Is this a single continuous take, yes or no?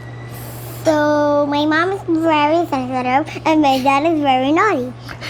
yes